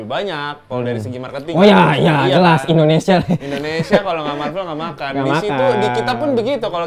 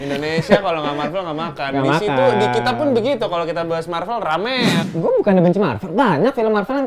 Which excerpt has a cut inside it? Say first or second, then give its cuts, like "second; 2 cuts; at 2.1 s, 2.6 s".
second; 1 cut; at 4.8 s